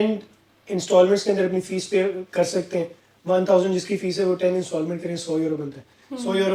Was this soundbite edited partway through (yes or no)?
no